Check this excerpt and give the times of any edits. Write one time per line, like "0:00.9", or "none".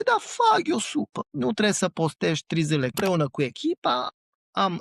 0:01.2
0:02.9
0:04.1